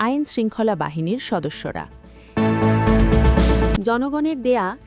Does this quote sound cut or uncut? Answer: cut